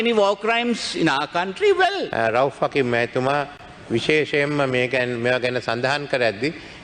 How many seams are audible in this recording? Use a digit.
1